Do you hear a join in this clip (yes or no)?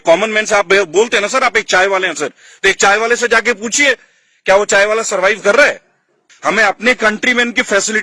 yes